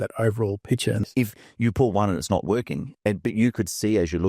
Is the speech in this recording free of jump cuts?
no; 1 cut; at 1.1 s

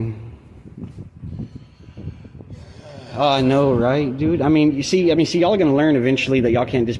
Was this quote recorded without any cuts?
yes; 0 cuts

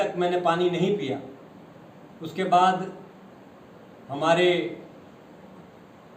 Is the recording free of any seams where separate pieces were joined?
yes; 0 cuts

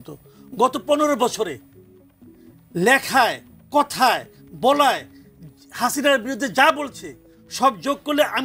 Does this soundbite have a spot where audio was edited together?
no; 0 cuts

